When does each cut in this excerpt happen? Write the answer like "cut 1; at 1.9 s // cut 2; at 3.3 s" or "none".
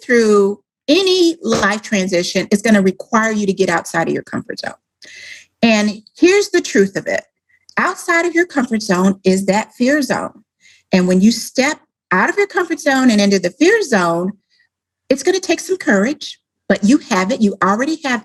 none